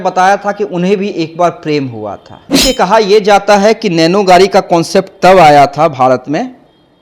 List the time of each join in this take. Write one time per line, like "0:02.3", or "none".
0:02.4